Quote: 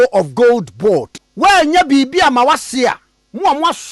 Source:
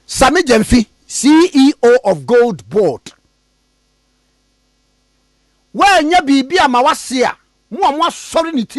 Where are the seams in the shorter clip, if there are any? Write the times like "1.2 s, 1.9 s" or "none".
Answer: 1.2 s